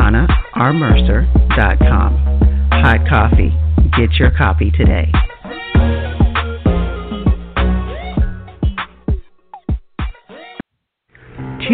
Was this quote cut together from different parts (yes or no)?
no